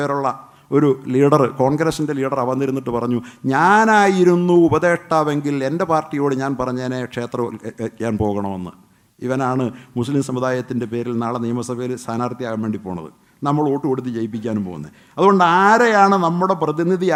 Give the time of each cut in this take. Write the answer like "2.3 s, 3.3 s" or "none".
none